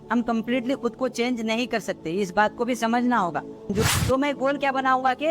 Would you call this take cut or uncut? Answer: cut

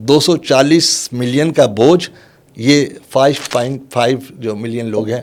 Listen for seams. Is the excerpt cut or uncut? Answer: uncut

